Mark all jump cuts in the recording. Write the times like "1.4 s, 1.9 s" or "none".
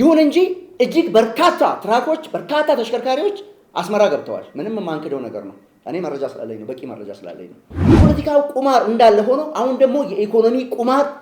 8.0 s